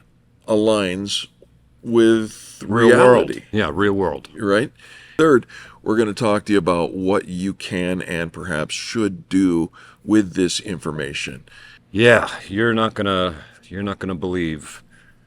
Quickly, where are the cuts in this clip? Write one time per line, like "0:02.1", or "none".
0:11.8

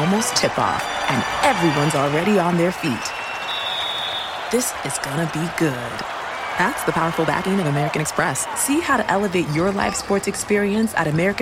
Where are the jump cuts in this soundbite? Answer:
none

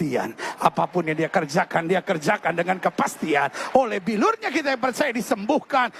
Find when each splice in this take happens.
none

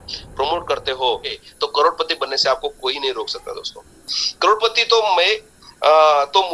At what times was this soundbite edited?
0:01.3

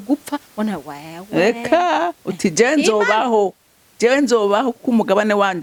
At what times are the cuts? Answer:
none

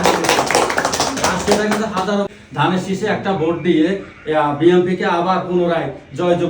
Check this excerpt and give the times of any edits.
0:02.4

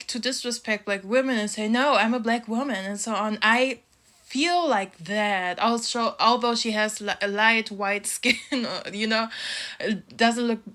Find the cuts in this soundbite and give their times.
none

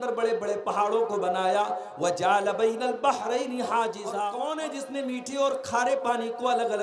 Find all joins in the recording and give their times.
0:04.2

